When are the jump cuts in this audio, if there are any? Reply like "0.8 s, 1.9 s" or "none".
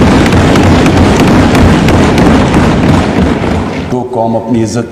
3.9 s